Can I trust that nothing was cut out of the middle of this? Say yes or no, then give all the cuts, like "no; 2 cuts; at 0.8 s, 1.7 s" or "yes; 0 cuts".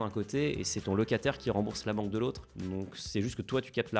yes; 0 cuts